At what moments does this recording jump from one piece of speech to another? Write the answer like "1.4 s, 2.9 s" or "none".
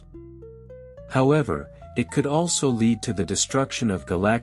none